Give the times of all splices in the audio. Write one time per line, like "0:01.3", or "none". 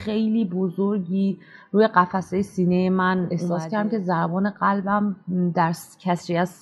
0:03.4